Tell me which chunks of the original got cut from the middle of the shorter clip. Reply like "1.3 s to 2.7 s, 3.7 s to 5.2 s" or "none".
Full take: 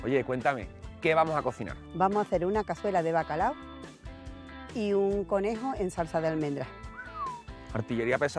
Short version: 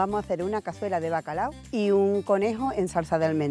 3.6 s to 4.6 s